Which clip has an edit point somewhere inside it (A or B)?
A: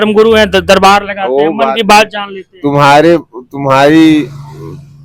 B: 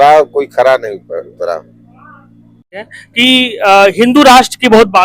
B